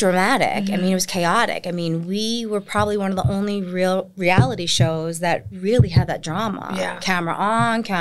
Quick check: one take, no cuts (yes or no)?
yes